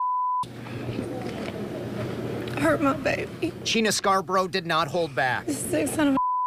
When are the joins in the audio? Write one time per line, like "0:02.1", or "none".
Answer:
none